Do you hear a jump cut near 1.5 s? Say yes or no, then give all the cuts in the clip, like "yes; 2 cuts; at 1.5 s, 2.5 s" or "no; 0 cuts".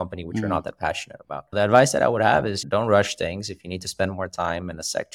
yes; 1 cut; at 1.5 s